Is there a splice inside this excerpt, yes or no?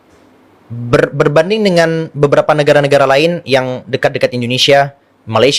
no